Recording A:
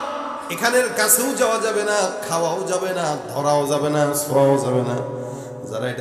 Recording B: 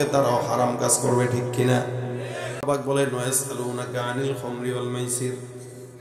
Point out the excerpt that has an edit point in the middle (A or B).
B